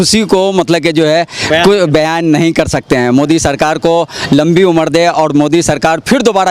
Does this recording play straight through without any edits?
yes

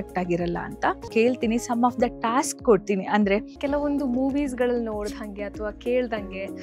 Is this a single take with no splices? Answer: no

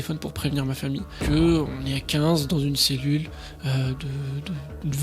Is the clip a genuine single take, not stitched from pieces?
no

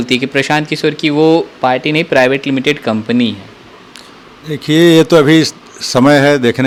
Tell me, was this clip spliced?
no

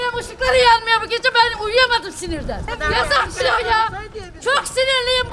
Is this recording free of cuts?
no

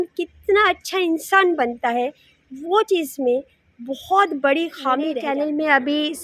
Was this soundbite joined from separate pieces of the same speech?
yes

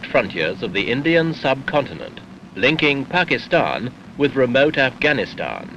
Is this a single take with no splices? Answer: no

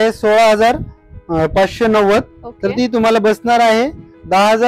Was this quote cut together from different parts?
no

